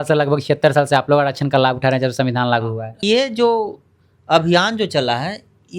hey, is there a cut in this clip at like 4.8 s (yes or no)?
no